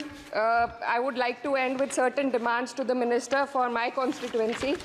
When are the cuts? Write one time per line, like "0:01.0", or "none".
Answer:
none